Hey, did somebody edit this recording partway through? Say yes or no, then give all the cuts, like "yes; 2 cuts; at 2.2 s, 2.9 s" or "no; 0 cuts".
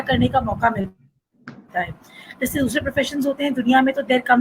no; 0 cuts